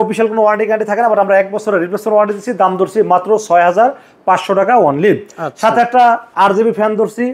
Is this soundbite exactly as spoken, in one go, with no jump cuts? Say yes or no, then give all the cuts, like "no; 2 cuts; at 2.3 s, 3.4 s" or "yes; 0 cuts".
yes; 0 cuts